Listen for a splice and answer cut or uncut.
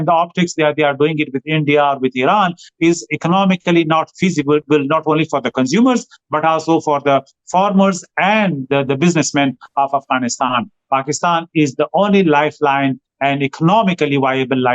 uncut